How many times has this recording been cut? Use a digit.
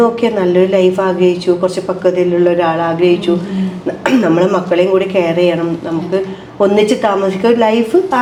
0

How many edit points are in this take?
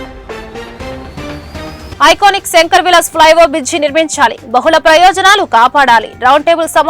1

